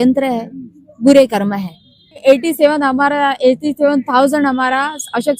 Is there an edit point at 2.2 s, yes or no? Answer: yes